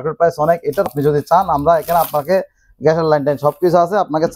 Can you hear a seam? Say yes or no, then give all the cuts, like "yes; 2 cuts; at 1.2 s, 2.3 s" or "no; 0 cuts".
yes; 1 cut; at 0.9 s